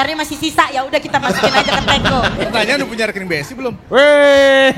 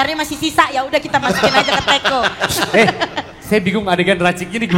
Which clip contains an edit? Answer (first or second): first